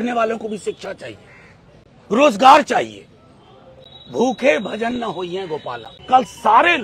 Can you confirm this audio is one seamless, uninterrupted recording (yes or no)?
no